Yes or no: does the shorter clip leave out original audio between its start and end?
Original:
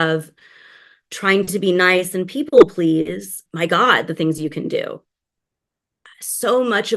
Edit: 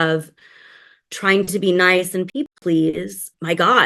yes